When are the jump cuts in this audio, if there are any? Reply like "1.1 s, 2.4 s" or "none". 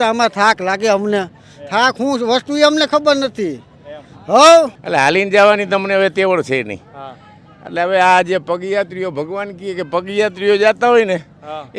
4.8 s